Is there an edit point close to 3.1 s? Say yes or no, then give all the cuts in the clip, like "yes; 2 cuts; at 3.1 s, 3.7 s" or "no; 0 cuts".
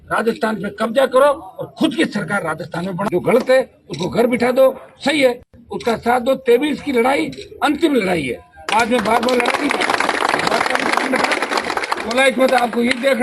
yes; 1 cut; at 3.1 s